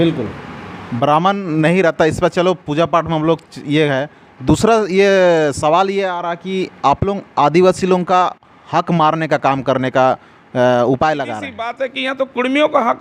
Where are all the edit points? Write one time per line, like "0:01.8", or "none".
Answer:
0:11.8